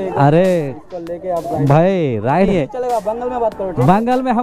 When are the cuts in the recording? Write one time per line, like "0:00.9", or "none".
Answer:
0:02.5